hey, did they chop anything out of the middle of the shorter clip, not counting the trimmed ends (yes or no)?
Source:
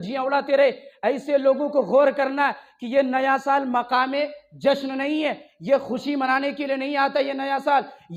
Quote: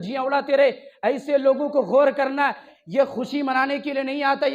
yes